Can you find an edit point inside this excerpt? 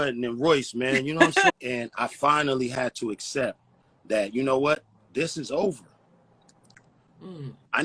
yes; 1 cut; at 1.6 s

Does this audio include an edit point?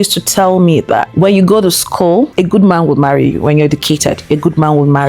no; 0 cuts

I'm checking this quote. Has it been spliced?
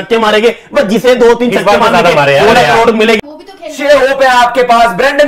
yes; 1 cut; at 3.2 s

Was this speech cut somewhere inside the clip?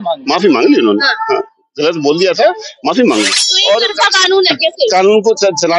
yes; 1 cut; at 3.5 s

